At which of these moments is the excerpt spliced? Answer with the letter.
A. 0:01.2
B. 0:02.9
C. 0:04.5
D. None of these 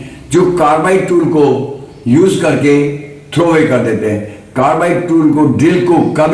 D